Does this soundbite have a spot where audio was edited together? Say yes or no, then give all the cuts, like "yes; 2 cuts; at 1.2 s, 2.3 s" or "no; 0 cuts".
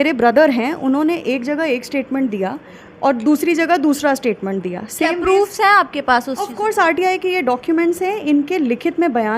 no; 0 cuts